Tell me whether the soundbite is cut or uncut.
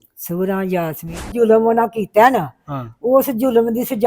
cut